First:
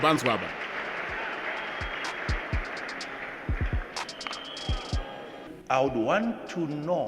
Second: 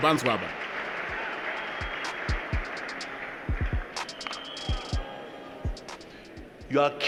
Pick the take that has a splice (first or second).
first